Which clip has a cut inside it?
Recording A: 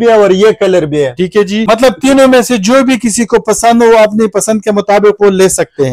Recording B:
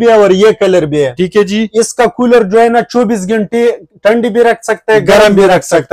A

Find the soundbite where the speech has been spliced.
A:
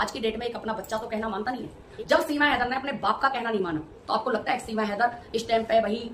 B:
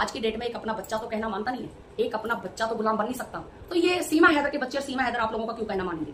A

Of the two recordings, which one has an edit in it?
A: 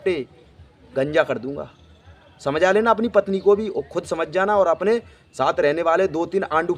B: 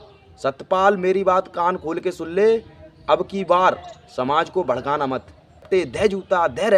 B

